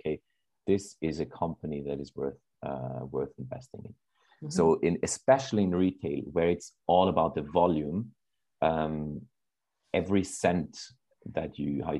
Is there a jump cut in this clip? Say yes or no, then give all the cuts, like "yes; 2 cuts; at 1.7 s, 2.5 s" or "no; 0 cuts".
no; 0 cuts